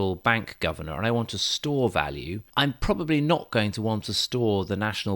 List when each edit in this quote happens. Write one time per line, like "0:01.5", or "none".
0:02.5